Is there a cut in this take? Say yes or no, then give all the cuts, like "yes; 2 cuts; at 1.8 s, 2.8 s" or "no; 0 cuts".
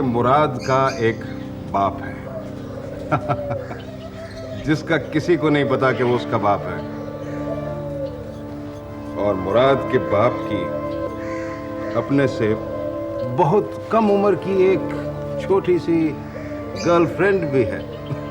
no; 0 cuts